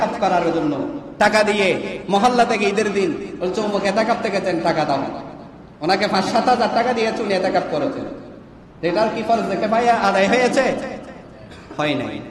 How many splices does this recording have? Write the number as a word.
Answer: zero